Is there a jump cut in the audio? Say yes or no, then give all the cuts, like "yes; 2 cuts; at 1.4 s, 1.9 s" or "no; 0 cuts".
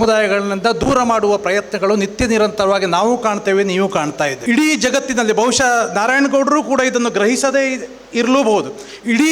yes; 1 cut; at 4.4 s